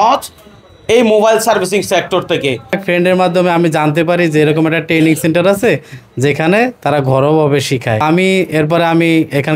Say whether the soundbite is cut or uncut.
cut